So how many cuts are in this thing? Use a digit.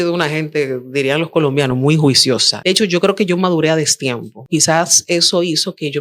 2